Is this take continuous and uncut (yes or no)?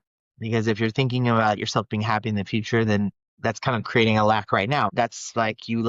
no